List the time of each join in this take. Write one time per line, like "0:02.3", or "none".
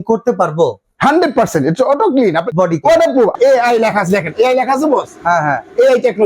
0:02.5
0:03.3